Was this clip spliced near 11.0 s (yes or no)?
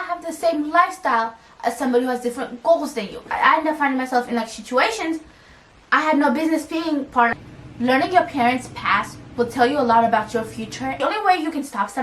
yes